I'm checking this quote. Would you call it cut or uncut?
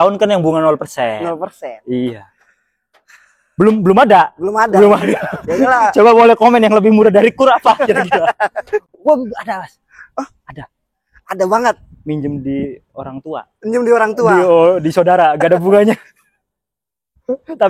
uncut